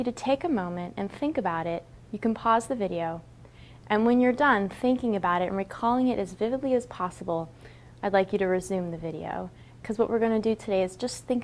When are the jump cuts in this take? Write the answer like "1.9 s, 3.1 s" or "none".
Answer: 6.9 s